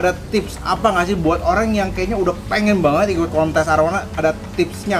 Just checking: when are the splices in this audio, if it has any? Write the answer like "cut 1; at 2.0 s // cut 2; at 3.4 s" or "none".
none